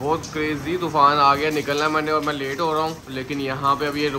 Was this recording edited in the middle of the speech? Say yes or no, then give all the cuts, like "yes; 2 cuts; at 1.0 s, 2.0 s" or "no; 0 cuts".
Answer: no; 0 cuts